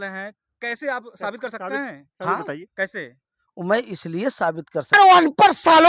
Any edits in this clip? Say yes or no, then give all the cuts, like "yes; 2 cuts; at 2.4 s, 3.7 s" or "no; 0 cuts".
yes; 1 cut; at 4.9 s